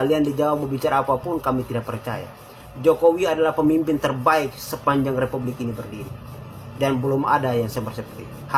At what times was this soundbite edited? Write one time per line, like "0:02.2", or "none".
none